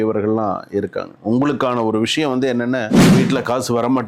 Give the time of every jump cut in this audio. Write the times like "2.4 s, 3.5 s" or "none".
3.0 s